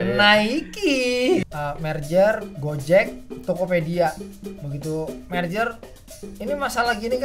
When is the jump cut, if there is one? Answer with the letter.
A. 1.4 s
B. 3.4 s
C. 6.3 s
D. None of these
A